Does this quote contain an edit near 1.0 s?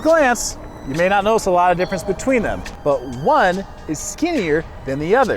no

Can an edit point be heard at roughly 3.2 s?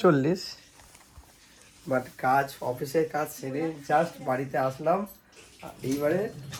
no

